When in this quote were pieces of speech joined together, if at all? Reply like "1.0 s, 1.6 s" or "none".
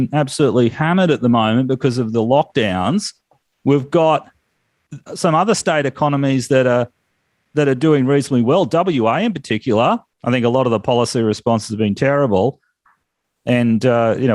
10.1 s